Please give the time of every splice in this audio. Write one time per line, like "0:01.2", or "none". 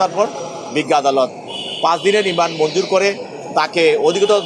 none